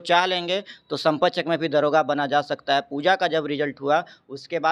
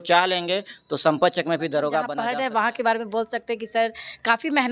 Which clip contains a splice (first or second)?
second